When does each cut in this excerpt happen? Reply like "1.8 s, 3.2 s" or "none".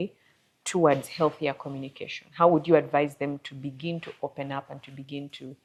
none